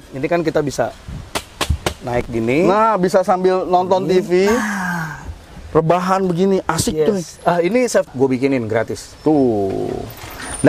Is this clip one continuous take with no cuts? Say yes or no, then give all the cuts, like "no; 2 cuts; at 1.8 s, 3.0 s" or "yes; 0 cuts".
no; 1 cut; at 8.1 s